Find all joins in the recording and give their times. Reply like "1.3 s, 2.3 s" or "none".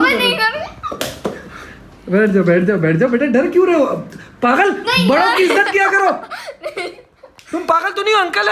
none

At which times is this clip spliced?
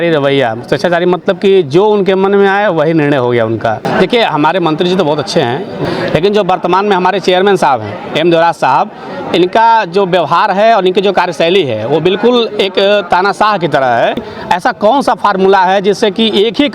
3.9 s, 5.8 s, 14.3 s

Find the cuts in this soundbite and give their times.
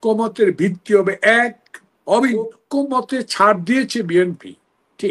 2.6 s

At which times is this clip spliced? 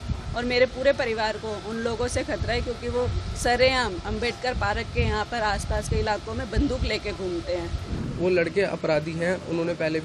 8.1 s

